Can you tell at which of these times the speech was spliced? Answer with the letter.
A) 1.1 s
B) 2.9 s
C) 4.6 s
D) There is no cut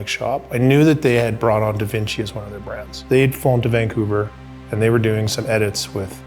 B